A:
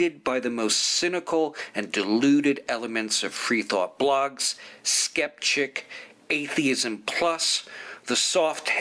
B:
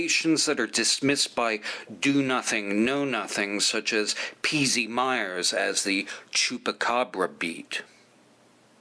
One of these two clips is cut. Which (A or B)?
A